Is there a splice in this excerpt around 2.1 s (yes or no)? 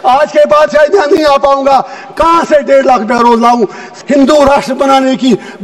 no